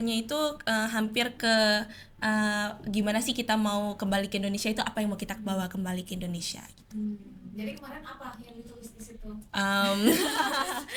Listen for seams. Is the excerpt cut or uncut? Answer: uncut